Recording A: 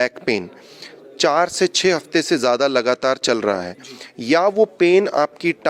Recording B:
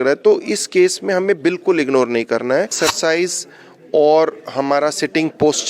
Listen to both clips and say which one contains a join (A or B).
B